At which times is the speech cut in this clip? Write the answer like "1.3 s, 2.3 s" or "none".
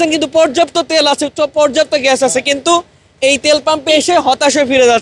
none